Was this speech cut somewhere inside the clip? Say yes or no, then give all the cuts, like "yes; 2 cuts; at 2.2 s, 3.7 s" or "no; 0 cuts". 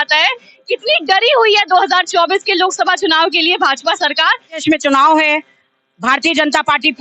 yes; 1 cut; at 4.6 s